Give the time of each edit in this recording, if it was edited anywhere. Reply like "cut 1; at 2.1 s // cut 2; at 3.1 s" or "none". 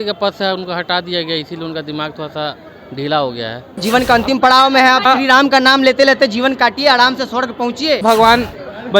cut 1; at 3.8 s // cut 2; at 5.0 s // cut 3; at 8.0 s